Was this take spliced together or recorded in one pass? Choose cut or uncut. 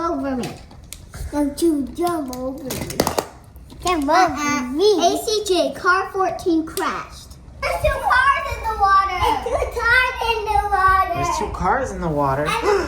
cut